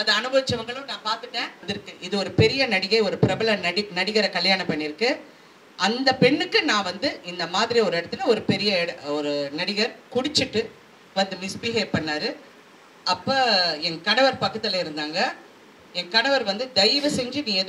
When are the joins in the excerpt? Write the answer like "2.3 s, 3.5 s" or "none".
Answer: 1.6 s